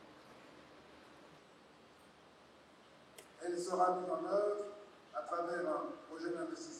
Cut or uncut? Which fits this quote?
cut